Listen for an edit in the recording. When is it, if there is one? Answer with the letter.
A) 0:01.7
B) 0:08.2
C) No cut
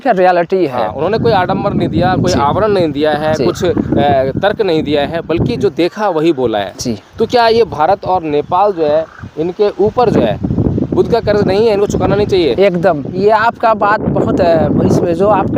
C